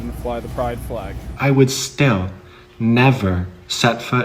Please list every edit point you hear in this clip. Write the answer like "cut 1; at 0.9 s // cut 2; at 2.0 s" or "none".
cut 1; at 1.3 s

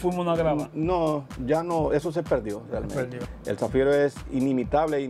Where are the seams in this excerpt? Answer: cut 1; at 3.2 s

